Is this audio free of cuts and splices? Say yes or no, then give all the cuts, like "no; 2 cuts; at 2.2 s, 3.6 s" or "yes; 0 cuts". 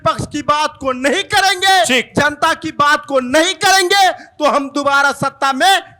yes; 0 cuts